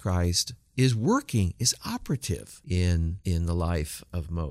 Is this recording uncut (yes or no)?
no